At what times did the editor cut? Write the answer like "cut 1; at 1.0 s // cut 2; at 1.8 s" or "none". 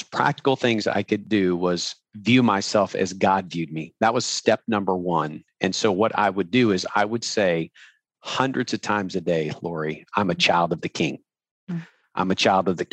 cut 1; at 1.2 s // cut 2; at 2.0 s